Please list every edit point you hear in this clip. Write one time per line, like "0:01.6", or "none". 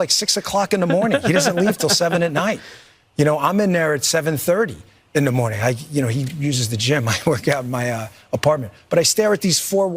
0:06.3